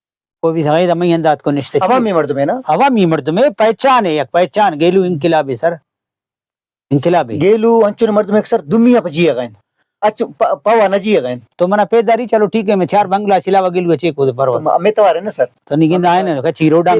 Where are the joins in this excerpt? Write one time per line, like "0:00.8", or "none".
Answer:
none